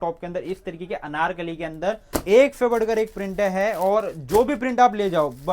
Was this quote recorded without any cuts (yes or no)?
no